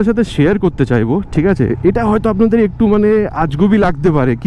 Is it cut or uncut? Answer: uncut